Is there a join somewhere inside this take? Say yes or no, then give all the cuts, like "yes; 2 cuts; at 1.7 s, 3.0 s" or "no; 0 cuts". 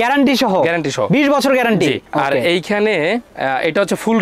no; 0 cuts